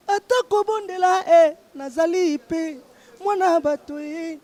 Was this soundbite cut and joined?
no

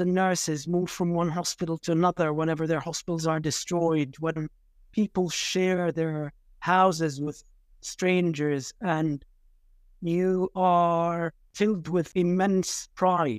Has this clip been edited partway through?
yes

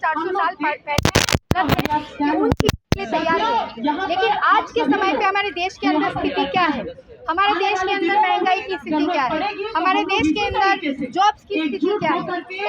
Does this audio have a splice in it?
yes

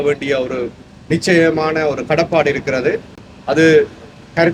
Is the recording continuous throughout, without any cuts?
yes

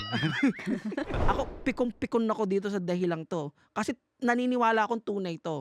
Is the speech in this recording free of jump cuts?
no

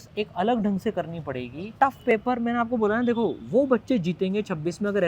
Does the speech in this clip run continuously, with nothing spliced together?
no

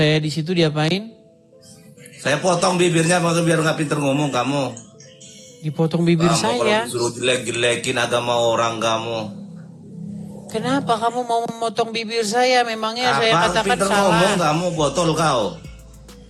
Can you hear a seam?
no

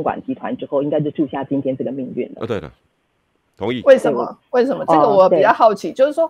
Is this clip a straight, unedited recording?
yes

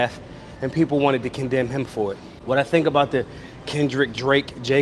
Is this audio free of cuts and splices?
no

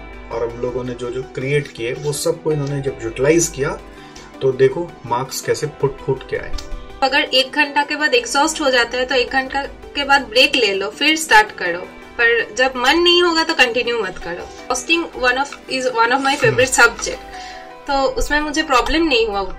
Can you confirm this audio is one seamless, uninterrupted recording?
no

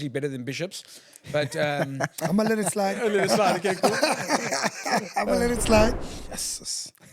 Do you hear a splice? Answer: yes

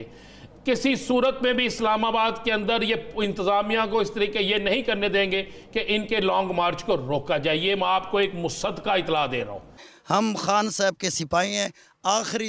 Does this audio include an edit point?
yes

